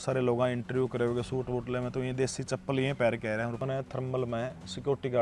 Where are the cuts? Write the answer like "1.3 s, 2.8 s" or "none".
3.6 s

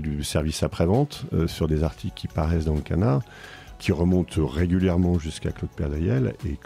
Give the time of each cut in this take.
none

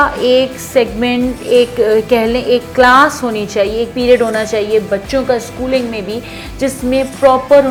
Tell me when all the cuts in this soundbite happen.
none

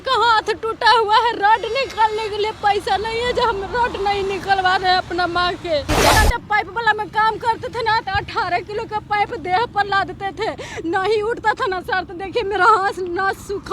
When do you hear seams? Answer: 6.1 s

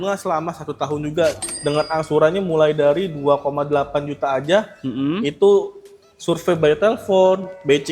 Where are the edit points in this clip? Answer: 1.5 s

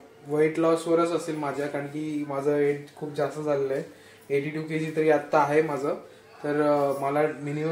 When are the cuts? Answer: none

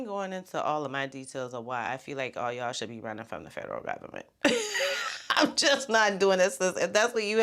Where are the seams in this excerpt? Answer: none

